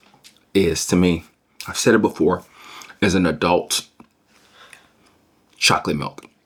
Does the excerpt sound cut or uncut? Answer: uncut